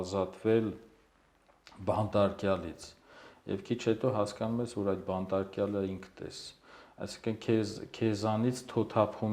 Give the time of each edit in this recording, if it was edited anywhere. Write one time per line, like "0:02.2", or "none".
none